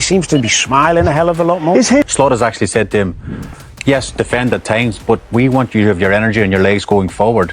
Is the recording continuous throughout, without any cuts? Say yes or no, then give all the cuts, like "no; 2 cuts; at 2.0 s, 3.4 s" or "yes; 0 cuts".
no; 1 cut; at 2.1 s